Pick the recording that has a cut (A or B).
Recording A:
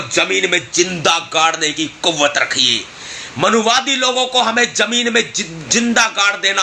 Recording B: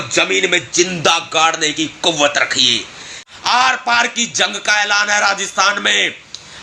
B